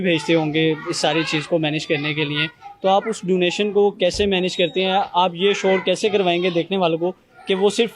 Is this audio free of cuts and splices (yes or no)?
yes